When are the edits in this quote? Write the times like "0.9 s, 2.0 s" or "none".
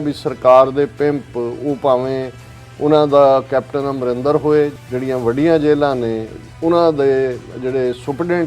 4.8 s